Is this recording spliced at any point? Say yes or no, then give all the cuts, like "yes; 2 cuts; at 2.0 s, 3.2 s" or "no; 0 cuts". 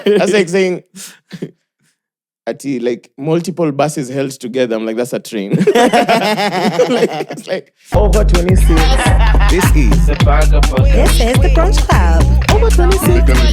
yes; 1 cut; at 8.0 s